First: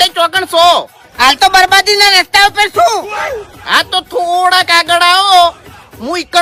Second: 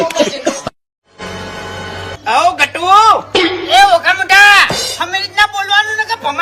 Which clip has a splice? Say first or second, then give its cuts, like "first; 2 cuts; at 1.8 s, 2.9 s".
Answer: second; 1 cut; at 0.9 s